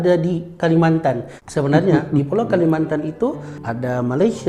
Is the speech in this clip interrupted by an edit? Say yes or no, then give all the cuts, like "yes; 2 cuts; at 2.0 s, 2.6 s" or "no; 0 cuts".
no; 0 cuts